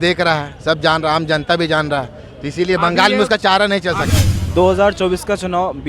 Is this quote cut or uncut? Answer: cut